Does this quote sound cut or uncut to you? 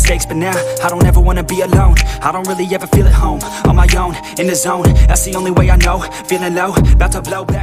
uncut